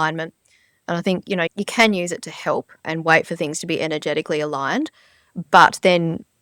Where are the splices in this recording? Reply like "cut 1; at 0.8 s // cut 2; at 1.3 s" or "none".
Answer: cut 1; at 1.5 s // cut 2; at 2.9 s